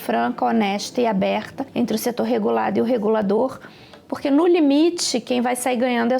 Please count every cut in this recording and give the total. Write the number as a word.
one